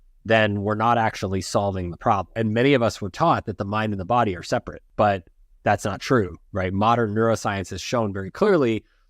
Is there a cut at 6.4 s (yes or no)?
no